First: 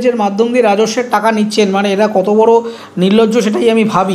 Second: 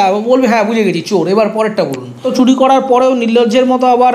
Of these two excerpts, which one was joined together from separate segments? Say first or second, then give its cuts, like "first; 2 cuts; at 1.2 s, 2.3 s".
second; 1 cut; at 2.3 s